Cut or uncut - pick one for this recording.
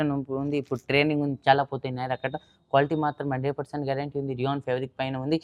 uncut